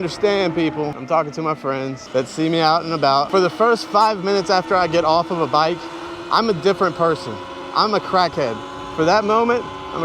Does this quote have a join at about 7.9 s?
no; 3 cuts; at 1.0 s, 2.0 s, 3.3 s

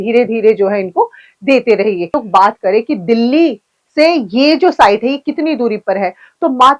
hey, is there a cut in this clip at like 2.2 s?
yes; 1 cut; at 2.2 s

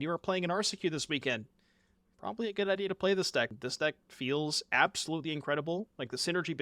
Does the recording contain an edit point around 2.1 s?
no; 1 cut; at 3.5 s

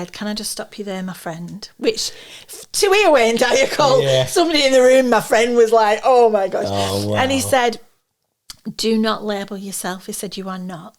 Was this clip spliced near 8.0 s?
no; 0 cuts

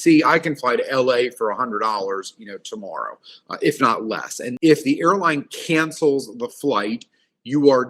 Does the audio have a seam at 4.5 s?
yes; 1 cut; at 4.5 s

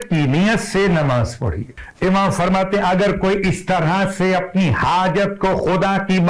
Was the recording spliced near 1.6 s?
yes; 1 cut; at 1.6 s

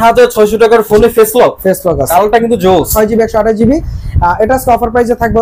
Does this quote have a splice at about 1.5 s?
no; 1 cut; at 2.9 s

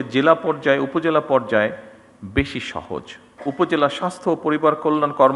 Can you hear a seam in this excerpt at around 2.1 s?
no; 1 cut; at 3.3 s

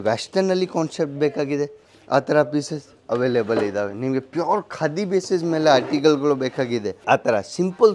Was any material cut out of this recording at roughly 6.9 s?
yes; 1 cut; at 6.9 s

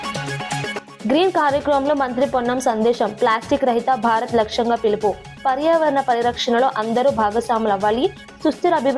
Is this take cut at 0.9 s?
yes; 1 cut; at 0.9 s

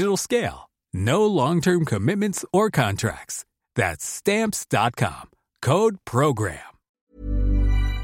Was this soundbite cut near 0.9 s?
no; 1 cut; at 7.0 s

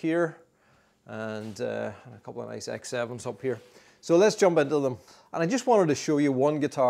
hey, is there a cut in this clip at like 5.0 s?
yes; 1 cut; at 5.0 s

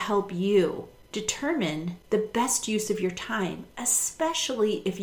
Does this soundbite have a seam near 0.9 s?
yes; 2 cuts; at 0.9 s, 2.0 s

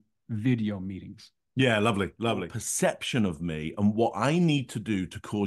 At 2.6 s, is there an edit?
yes; 1 cut; at 2.6 s

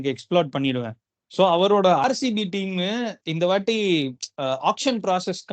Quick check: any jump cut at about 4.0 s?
no; 1 cut; at 2.0 s

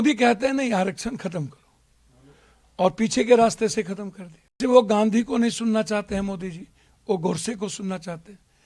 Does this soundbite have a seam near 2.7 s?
no; 1 cut; at 4.6 s

